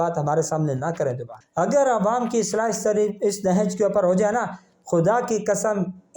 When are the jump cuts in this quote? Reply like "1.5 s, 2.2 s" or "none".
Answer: 1.3 s